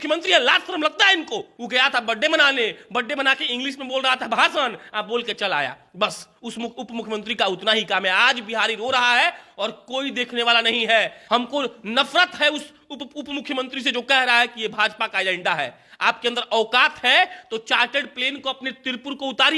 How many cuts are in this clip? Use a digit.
2